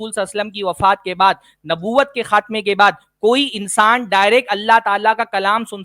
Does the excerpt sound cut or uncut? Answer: uncut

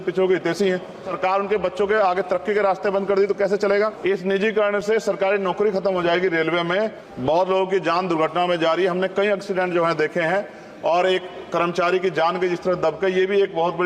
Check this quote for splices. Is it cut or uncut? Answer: cut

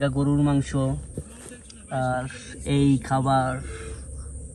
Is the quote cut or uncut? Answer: uncut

